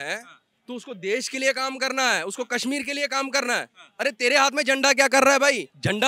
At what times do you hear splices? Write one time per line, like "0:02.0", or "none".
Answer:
none